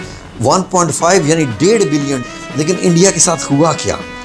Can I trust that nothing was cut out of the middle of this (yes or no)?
no